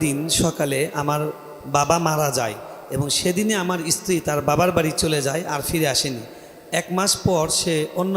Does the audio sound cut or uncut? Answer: uncut